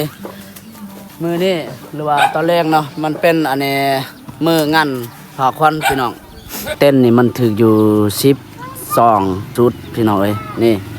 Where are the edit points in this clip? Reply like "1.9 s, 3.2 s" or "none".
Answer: 6.7 s, 9.5 s